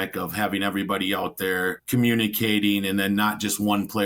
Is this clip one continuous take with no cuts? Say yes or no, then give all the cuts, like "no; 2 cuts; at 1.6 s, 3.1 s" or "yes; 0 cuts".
no; 1 cut; at 1.8 s